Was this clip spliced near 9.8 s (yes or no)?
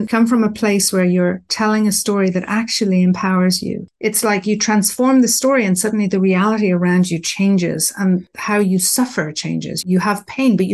yes